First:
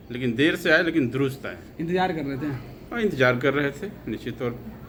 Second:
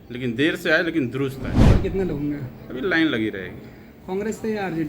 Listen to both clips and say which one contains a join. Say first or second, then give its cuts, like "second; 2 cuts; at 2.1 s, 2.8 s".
second; 1 cut; at 1.7 s